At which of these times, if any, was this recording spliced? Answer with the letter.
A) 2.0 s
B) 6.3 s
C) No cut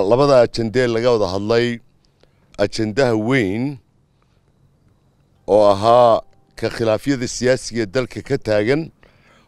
C